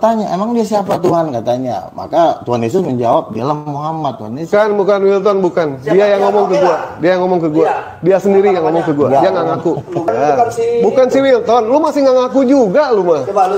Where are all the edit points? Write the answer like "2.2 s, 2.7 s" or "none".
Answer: 4.4 s, 10.1 s